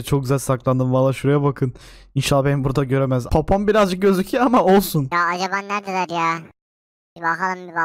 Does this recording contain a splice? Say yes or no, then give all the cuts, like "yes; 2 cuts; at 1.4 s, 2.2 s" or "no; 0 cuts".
no; 0 cuts